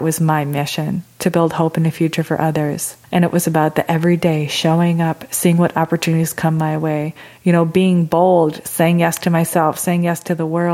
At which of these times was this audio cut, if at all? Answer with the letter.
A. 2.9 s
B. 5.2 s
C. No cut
A